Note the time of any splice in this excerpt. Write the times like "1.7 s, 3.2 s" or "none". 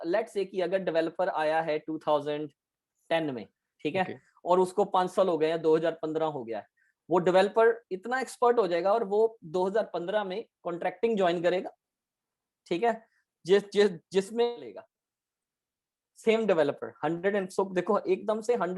14.8 s